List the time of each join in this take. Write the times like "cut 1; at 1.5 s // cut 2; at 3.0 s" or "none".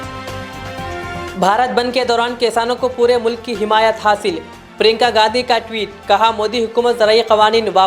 cut 1; at 1.2 s